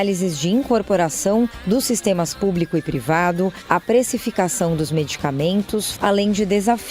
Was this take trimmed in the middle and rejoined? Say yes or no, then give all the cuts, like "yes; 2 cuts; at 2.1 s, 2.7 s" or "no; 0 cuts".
yes; 1 cut; at 5.9 s